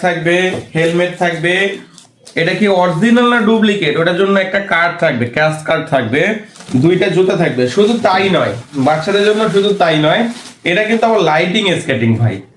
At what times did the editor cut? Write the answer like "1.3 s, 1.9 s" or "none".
none